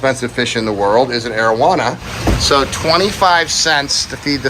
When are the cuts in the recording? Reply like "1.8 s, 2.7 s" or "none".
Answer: 2.1 s